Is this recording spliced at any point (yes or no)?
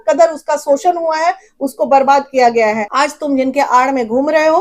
yes